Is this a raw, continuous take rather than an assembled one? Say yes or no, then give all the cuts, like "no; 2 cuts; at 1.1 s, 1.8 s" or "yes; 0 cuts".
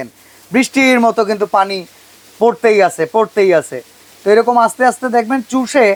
yes; 0 cuts